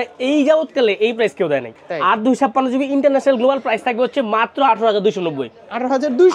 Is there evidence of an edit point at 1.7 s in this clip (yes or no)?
no